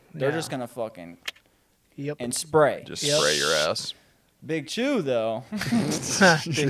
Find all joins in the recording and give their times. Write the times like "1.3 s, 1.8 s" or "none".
none